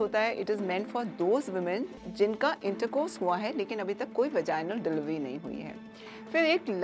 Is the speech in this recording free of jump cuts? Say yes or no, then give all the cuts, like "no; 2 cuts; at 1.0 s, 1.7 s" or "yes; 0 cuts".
yes; 0 cuts